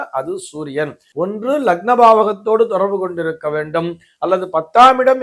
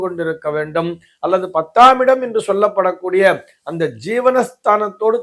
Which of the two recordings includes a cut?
first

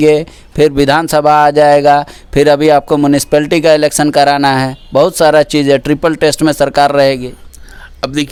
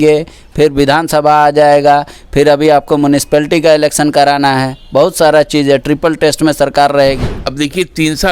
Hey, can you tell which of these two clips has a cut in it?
second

